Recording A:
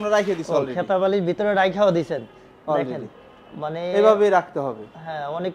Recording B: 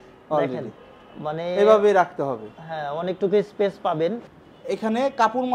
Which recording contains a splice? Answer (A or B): B